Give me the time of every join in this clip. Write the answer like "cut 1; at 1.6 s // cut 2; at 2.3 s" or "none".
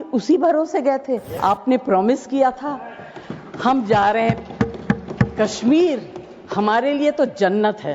cut 1; at 1.3 s